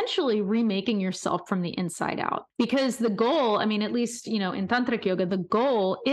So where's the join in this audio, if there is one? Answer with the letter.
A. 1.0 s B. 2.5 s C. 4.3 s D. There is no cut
B